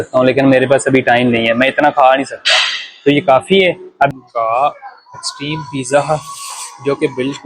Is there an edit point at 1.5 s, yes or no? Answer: no